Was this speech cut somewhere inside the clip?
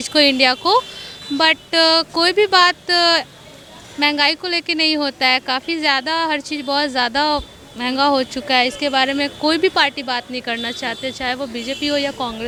no; 0 cuts

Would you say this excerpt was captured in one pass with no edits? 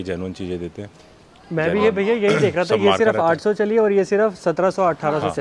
yes; 0 cuts

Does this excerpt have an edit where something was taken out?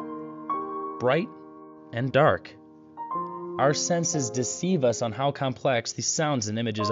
yes; 1 cut; at 1.0 s

